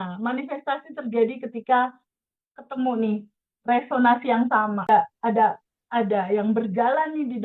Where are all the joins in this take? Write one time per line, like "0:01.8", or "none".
0:04.9